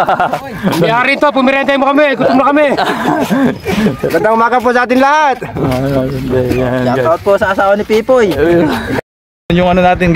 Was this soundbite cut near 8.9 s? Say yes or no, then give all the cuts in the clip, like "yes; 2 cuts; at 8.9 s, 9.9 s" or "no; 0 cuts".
yes; 1 cut; at 8.9 s